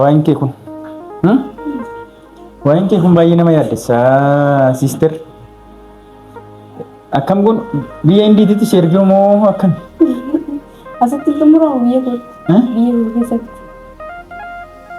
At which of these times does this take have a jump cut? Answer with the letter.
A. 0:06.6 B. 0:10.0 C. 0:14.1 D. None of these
C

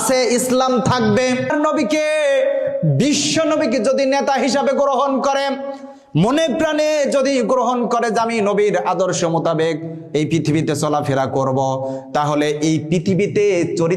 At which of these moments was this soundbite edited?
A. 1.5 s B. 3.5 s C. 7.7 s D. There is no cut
A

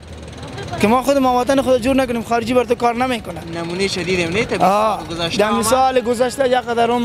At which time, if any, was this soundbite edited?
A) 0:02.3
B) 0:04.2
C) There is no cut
C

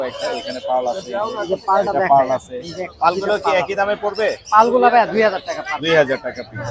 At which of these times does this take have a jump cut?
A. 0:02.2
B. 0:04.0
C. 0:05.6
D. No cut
D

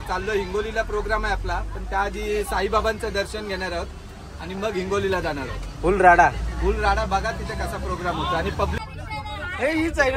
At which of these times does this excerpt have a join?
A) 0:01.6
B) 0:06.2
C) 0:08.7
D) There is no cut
C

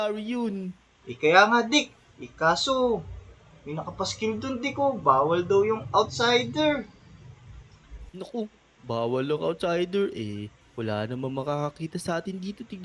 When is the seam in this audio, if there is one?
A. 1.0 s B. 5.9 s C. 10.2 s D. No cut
A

